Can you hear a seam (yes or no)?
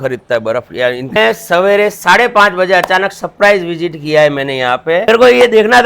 yes